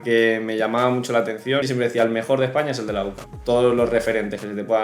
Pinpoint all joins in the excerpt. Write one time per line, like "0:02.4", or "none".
0:01.7
0:03.2

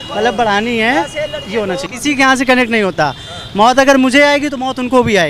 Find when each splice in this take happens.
0:01.9

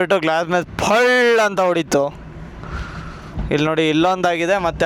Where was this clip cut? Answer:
none

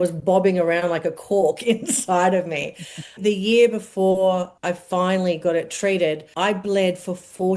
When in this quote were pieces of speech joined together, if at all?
0:03.1
0:04.5
0:06.3

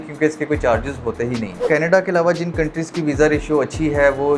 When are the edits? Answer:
0:01.7

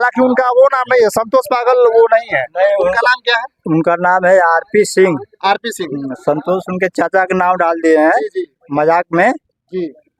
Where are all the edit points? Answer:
none

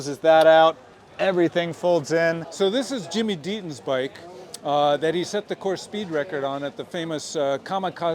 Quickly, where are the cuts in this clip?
0:02.5

